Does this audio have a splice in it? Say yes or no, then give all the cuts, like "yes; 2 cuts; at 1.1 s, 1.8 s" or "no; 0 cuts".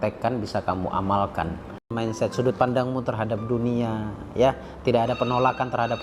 yes; 1 cut; at 1.9 s